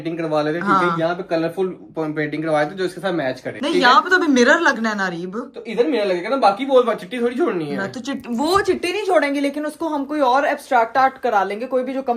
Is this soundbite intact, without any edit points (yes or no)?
yes